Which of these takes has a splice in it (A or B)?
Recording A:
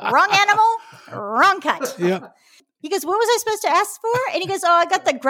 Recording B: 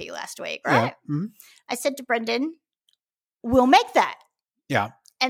A